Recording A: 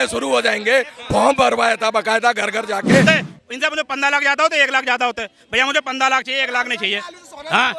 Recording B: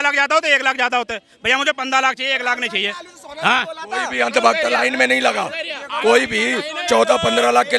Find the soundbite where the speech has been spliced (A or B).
A